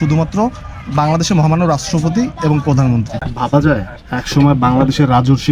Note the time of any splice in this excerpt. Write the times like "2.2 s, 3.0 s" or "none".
3.2 s